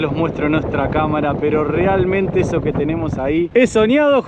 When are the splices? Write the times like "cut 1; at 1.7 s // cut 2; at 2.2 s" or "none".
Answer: none